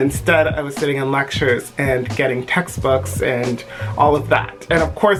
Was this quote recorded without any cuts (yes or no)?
yes